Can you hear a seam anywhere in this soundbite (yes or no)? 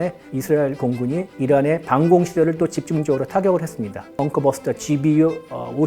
yes